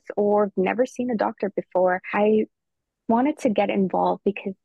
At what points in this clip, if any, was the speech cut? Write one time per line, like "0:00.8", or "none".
0:02.1